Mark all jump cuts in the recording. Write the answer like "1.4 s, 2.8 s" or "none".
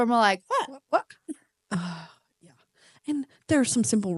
1.6 s